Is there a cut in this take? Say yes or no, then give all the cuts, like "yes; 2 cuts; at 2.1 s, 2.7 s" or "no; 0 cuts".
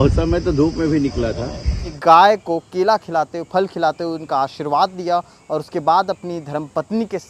yes; 1 cut; at 1.9 s